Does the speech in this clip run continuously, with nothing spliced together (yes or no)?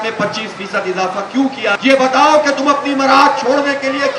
no